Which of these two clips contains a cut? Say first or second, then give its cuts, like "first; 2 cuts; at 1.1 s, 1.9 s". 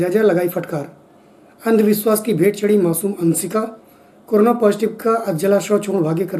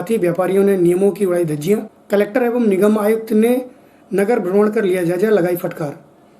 second; 1 cut; at 1.9 s